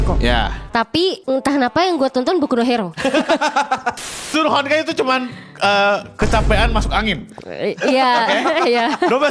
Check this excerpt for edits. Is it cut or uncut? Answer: cut